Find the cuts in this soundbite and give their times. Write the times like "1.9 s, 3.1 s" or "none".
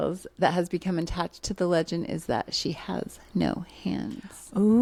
none